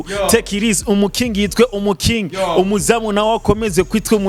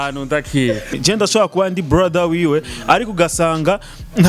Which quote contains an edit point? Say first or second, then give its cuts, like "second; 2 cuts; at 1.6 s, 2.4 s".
second; 1 cut; at 0.9 s